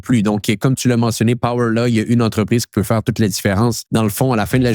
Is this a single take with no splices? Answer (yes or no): no